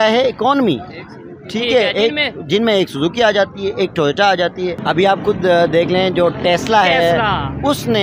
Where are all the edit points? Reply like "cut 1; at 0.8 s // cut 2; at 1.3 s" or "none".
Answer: cut 1; at 4.8 s